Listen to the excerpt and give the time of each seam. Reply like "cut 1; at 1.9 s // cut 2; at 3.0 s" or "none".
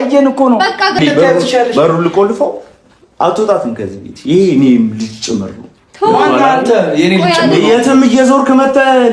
cut 1; at 1.0 s